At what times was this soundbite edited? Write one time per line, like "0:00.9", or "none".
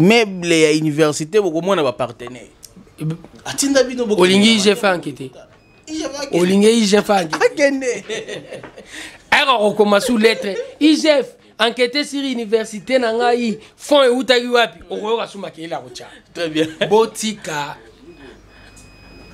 none